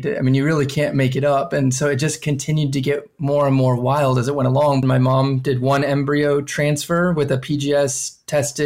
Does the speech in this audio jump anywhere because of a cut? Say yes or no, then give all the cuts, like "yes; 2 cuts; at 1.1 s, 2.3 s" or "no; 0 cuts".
yes; 1 cut; at 4.8 s